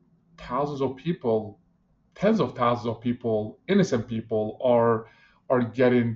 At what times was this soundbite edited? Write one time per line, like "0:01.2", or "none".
none